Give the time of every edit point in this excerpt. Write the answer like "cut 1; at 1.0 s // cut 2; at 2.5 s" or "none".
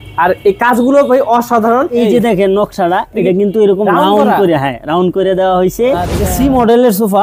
cut 1; at 1.9 s // cut 2; at 6.2 s